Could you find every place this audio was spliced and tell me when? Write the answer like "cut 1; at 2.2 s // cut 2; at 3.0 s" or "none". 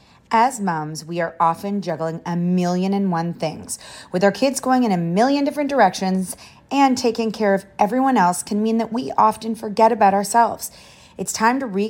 none